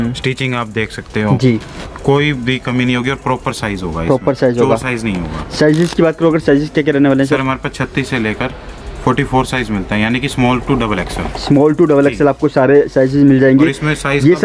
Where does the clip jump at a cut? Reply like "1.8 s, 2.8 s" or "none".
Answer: none